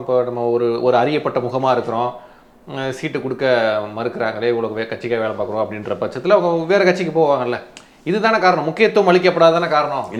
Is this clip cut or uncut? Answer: uncut